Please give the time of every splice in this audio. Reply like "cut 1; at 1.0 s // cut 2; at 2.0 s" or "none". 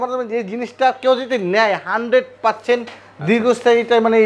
none